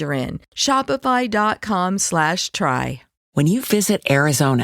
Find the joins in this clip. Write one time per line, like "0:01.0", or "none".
0:03.3